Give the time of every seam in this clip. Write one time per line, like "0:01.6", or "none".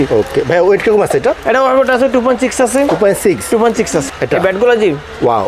0:04.1